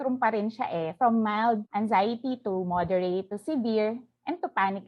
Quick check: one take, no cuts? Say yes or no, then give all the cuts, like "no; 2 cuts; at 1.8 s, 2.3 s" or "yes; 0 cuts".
yes; 0 cuts